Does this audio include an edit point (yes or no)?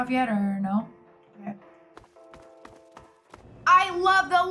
yes